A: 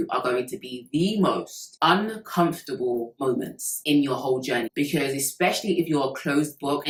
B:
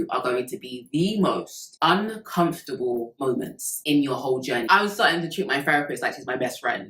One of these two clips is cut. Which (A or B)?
B